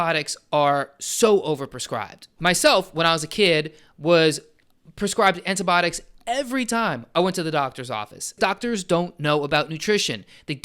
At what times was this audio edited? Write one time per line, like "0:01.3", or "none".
0:08.4

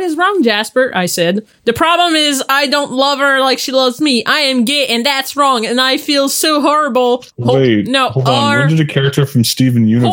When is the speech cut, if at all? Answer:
none

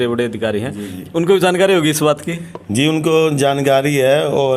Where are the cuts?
none

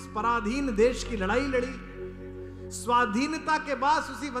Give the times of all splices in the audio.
none

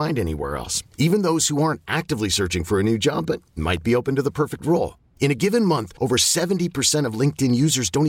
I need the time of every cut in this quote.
none

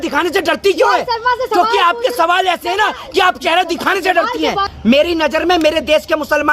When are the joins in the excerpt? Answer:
0:04.7

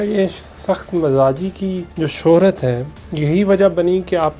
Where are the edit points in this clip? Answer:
0:01.9

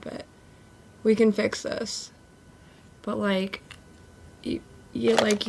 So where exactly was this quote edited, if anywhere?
none

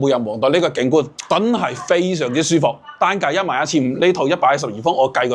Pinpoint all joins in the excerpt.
0:01.2

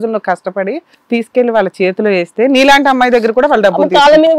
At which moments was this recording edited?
0:00.9

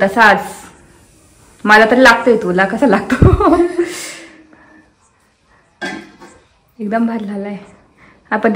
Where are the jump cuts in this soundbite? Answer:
none

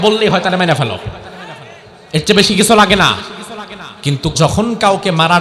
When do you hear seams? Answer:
0:04.3

